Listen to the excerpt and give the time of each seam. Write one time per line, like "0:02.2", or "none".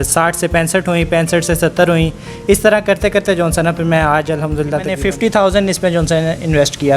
0:05.0